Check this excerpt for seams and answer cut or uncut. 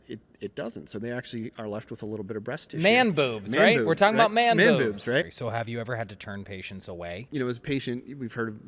cut